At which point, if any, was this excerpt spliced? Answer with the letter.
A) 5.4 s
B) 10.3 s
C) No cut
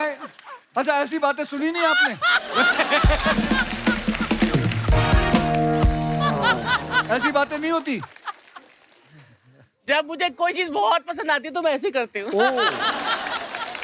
C